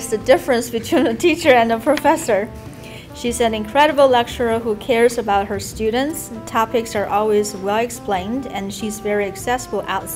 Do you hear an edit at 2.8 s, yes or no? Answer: no